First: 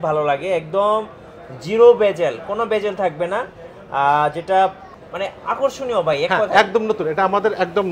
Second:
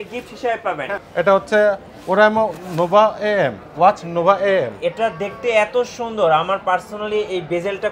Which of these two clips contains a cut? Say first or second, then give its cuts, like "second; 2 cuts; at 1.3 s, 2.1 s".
second; 1 cut; at 0.9 s